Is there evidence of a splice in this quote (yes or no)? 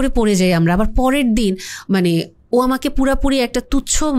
no